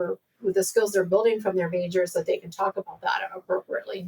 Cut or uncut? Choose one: uncut